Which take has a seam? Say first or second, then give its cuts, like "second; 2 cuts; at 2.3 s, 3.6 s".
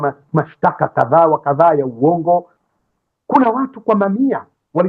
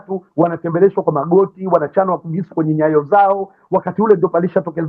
first; 1 cut; at 2.6 s